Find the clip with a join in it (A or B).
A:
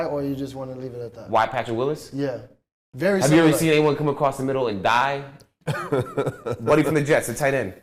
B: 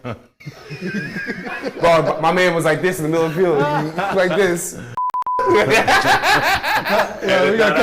A